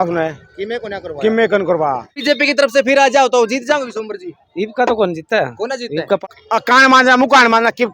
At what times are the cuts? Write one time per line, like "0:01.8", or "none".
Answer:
0:02.1
0:06.4